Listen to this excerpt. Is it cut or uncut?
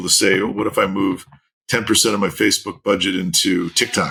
uncut